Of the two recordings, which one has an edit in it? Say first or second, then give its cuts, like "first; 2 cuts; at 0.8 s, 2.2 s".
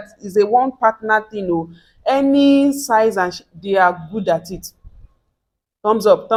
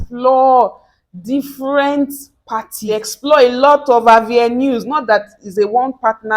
second; 1 cut; at 2.8 s